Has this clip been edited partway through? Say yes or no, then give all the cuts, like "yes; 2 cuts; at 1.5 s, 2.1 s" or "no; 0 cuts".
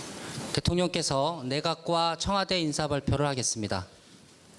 no; 0 cuts